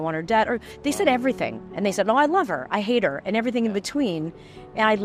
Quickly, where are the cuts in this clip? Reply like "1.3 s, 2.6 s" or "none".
none